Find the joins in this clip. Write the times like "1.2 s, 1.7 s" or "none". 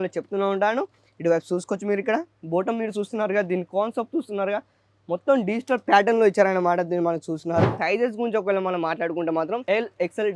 7.8 s